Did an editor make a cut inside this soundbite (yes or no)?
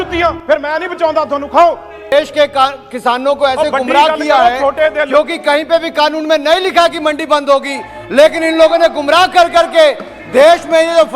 yes